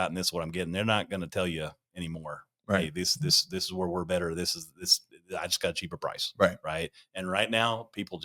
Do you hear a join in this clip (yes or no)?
no